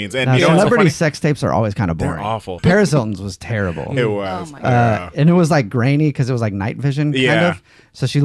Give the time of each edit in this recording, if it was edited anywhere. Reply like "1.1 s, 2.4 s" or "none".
2.6 s